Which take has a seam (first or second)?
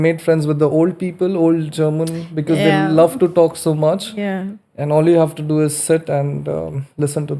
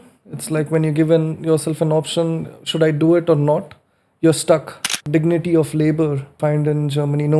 second